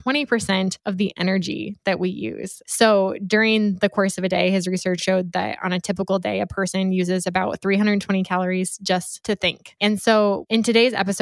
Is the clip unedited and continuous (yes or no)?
no